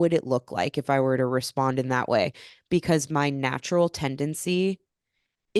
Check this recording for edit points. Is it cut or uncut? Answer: uncut